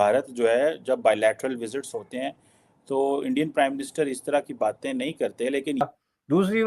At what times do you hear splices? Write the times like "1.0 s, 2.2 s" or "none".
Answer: 5.7 s

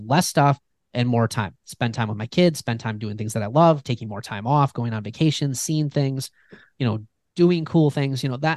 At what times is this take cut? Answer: 3.8 s

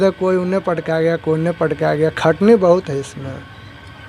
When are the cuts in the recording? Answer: none

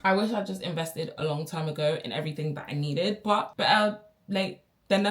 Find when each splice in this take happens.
none

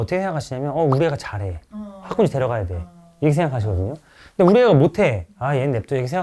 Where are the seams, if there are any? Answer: none

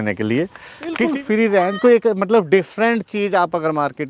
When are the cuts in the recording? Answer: 1.0 s

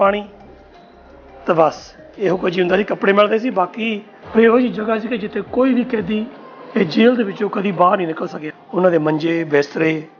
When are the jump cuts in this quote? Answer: 4.1 s, 8.4 s

